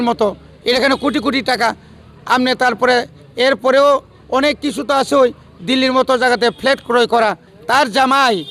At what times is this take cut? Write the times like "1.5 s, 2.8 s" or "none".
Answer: 7.5 s